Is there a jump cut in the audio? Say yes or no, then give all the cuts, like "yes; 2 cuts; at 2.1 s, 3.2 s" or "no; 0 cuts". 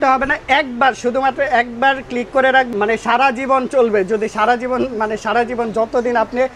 no; 0 cuts